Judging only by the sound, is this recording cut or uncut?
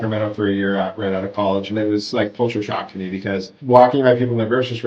uncut